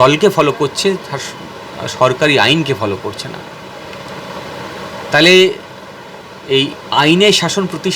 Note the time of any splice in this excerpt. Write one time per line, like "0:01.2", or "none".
none